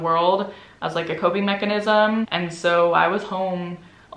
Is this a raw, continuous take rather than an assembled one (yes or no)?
no